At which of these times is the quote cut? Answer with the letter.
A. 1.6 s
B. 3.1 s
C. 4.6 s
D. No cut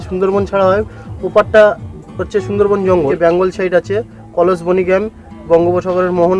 B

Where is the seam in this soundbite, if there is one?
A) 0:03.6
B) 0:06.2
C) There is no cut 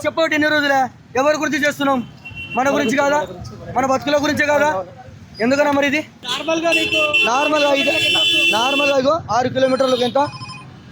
B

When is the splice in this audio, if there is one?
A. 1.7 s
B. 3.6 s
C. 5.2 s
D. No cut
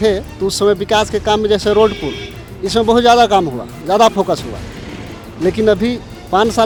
D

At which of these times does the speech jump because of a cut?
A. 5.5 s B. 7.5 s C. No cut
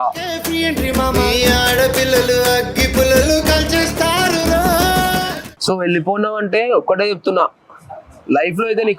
A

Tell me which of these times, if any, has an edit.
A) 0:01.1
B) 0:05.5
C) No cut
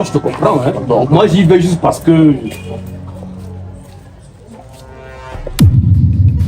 B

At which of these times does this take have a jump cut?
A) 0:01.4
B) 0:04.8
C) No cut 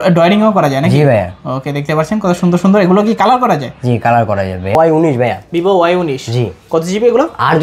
B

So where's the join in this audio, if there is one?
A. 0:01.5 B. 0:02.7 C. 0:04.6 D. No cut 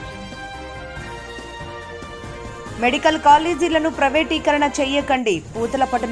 B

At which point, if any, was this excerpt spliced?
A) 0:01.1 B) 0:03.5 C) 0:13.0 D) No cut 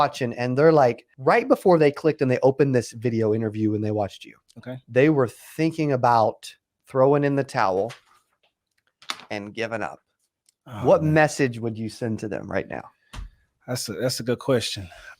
A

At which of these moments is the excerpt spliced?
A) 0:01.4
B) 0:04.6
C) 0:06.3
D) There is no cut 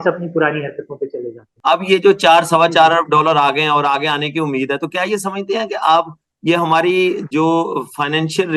A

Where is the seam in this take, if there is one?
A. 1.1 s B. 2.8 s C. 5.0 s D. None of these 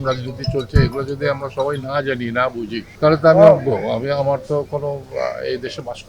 B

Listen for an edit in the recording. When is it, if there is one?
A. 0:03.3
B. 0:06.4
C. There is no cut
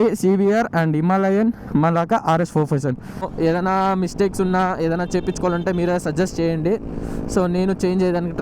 A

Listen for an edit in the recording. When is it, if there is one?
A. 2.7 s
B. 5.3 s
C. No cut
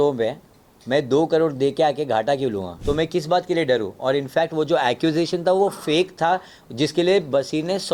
A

